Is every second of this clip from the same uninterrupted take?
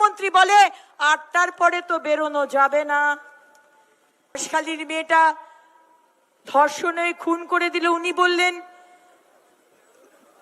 no; 1 cut; at 4.4 s

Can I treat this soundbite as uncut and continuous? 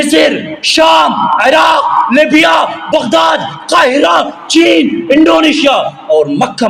yes; 0 cuts

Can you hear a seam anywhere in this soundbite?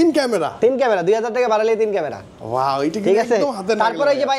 no; 0 cuts

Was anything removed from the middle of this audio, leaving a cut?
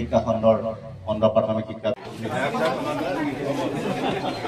yes; 1 cut; at 1.8 s

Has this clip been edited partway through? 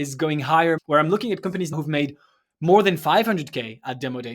yes; 2 cuts; at 0.8 s, 1.7 s

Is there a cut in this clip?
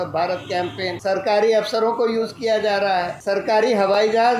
yes; 2 cuts; at 1.0 s, 3.1 s

